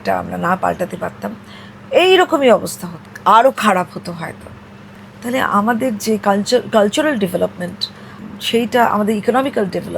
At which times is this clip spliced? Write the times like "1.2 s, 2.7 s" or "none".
none